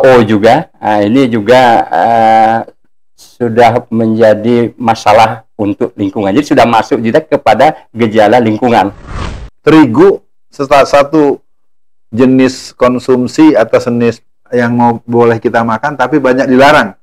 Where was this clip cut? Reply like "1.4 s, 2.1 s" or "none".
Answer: 9.1 s